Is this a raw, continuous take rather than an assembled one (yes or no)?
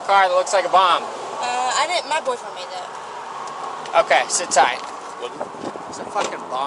yes